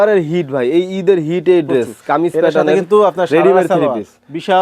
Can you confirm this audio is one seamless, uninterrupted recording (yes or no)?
yes